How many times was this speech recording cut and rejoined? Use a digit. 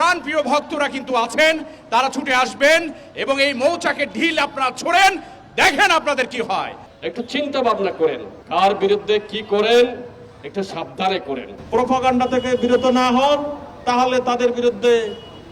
3